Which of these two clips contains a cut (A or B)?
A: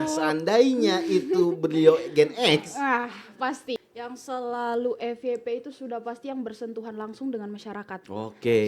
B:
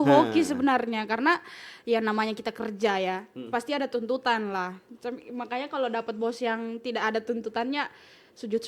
A